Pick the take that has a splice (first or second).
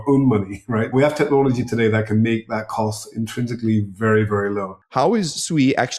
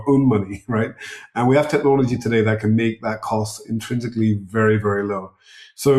first